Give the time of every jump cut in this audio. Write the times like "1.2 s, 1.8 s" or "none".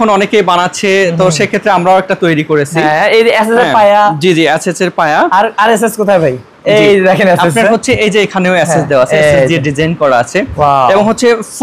none